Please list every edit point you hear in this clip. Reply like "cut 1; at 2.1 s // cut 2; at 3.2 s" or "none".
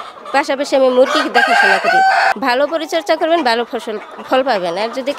cut 1; at 2.3 s